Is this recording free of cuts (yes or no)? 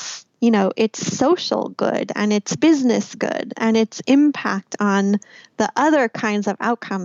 yes